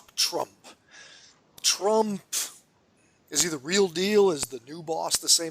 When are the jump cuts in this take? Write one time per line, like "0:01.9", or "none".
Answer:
0:03.2